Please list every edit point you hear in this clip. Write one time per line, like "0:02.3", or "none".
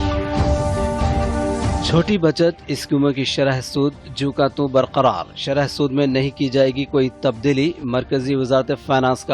0:01.3